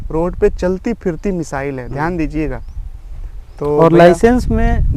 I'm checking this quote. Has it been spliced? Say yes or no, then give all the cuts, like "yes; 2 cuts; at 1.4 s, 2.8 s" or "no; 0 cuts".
no; 0 cuts